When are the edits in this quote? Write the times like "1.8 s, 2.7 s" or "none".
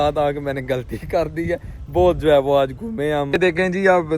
3.3 s